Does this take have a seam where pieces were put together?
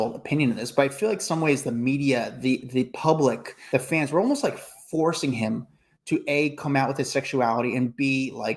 yes; 1 cut; at 3.5 s

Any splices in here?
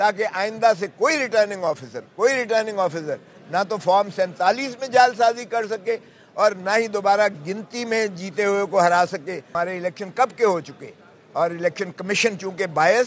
yes; 1 cut; at 9.4 s

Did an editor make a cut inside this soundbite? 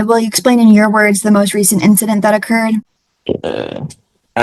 yes; 1 cut; at 3.0 s

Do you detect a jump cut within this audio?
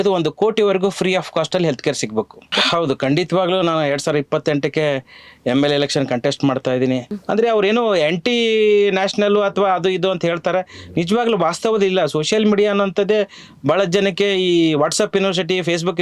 yes; 2 cuts; at 2.5 s, 7.2 s

